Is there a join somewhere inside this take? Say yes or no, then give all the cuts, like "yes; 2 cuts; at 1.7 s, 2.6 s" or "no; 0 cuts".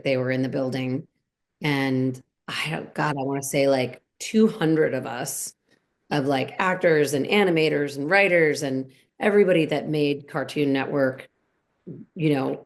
yes; 1 cut; at 2.3 s